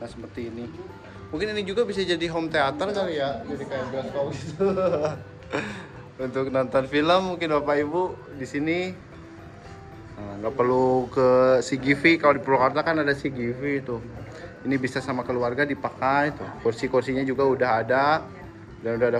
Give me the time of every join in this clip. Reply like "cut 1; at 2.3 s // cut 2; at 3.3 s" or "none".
none

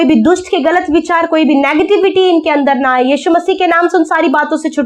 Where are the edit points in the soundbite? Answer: none

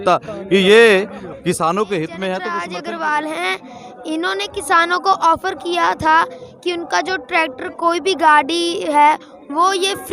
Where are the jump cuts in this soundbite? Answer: cut 1; at 2.6 s

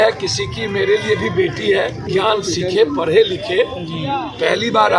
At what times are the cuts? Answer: cut 1; at 2.0 s

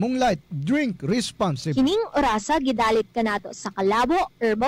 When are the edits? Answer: cut 1; at 1.7 s

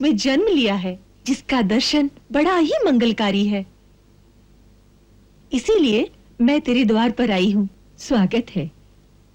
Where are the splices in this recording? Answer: none

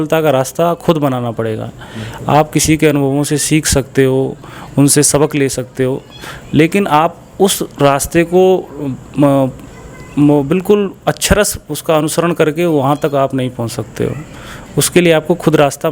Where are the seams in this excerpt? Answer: none

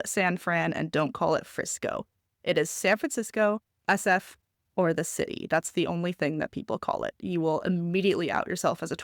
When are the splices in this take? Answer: none

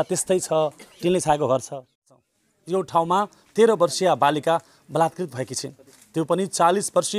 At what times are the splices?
cut 1; at 2.1 s

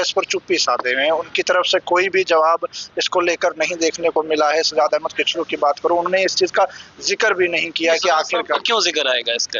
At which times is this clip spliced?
none

